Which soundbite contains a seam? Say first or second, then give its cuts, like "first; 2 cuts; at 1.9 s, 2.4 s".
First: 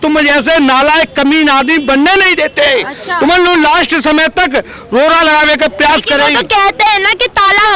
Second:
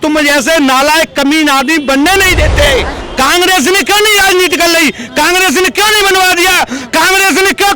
second; 1 cut; at 3.0 s